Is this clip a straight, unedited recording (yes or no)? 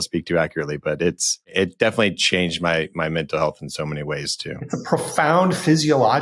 no